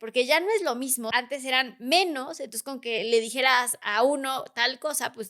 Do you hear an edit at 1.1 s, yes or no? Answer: yes